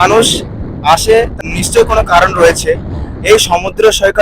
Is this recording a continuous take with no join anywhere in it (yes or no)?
no